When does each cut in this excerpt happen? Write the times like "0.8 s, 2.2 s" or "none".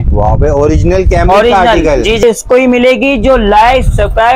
2.2 s